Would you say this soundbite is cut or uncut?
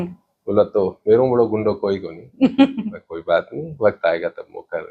uncut